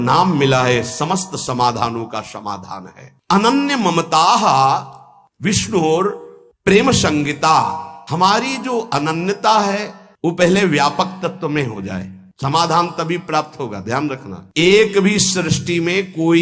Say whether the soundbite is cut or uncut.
uncut